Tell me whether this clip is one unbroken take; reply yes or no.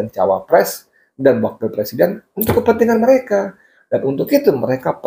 yes